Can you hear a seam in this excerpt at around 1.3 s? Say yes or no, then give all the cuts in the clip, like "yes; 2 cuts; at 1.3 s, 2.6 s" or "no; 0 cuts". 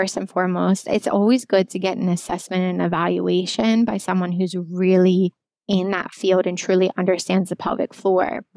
no; 1 cut; at 5.5 s